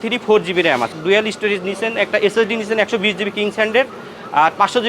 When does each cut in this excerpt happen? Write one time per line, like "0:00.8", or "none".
0:01.0